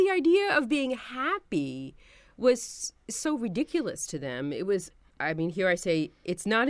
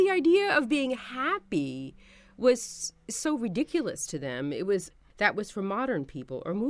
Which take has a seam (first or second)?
second